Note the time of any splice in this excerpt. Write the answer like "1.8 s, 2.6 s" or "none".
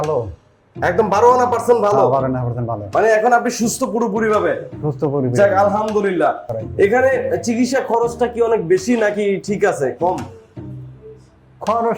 6.6 s